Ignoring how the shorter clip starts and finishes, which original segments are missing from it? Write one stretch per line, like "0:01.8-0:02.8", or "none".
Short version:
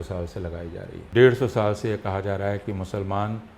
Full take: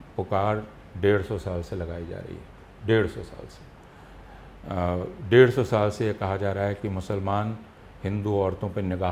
0:02.4-0:05.2